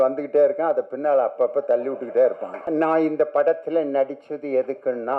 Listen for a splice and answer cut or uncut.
cut